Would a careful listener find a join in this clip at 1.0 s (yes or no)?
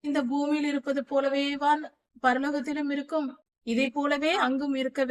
no